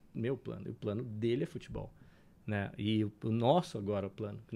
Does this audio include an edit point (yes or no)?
no